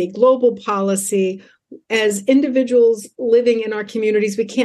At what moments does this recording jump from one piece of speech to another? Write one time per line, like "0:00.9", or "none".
none